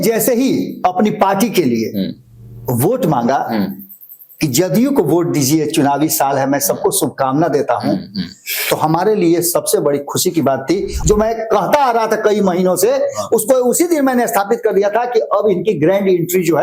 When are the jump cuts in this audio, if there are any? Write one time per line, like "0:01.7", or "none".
0:10.9